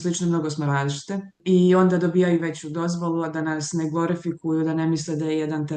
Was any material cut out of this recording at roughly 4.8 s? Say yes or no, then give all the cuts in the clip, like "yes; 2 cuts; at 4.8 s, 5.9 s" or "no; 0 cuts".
no; 1 cut; at 1.4 s